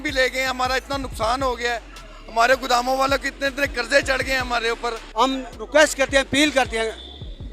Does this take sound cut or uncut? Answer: cut